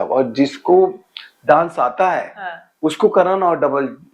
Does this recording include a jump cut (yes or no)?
no